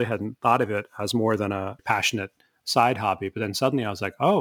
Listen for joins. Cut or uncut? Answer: cut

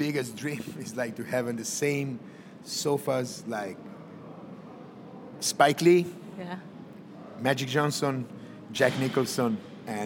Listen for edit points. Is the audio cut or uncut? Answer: uncut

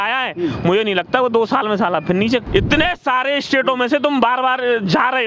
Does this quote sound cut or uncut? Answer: cut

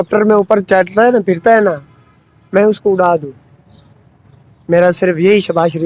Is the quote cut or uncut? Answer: uncut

